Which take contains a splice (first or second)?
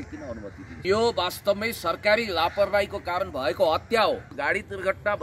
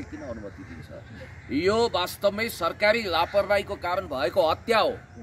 first